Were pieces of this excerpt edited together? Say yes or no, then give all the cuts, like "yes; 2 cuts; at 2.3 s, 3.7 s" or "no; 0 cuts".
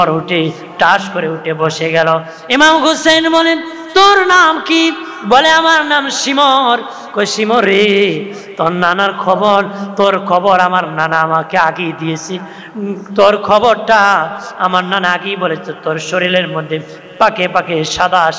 no; 0 cuts